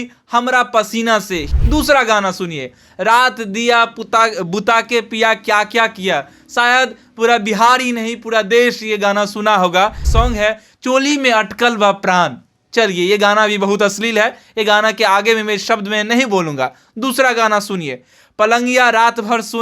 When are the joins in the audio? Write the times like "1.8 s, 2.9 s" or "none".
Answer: 1.5 s, 10.1 s